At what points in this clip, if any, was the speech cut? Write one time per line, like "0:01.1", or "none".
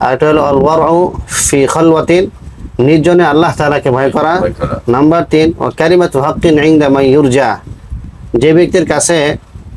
0:08.1